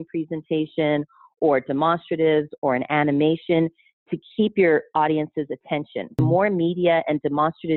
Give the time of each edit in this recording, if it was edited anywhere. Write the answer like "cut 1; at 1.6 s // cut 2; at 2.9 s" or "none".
cut 1; at 6.2 s

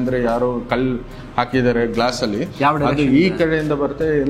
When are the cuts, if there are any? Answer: none

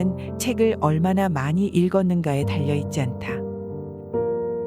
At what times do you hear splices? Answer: cut 1; at 3.2 s

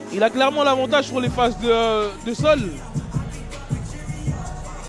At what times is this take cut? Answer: none

